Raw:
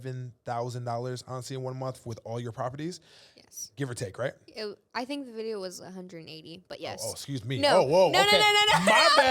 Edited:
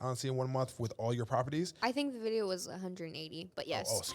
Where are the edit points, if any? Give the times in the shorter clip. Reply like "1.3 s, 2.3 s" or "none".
1.7 s